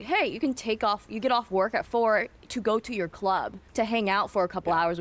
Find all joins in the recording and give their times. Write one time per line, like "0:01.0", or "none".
0:03.6